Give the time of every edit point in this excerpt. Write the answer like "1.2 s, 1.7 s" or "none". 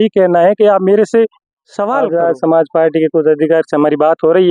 2.0 s